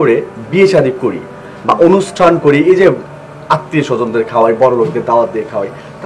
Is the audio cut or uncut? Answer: uncut